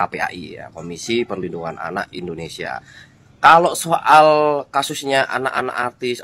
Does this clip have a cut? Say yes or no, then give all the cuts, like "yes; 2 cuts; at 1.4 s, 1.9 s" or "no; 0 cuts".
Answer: no; 0 cuts